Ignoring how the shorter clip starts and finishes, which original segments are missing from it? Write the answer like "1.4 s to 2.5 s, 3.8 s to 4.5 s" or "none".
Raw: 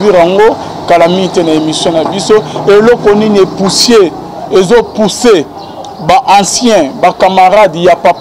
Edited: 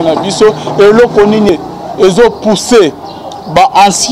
3.4 s to 4.0 s